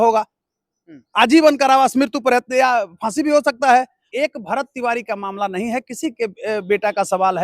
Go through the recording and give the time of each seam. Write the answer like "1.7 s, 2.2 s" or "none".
4.0 s